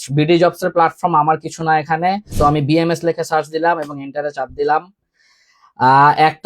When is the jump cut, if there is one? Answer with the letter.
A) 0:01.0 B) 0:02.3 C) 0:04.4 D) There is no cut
B